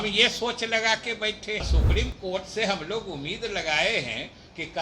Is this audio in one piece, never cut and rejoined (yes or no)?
no